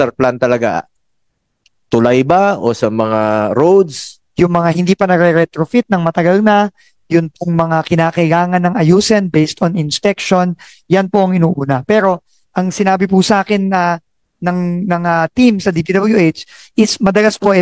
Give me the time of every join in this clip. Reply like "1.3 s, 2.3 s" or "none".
4.2 s